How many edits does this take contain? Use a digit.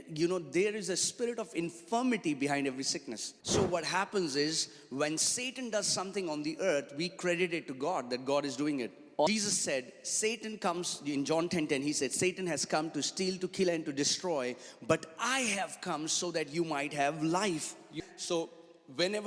3